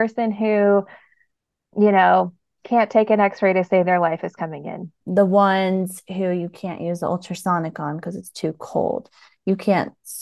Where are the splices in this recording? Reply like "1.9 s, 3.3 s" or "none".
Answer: 4.9 s